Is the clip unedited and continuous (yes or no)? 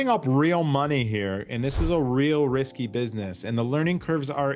yes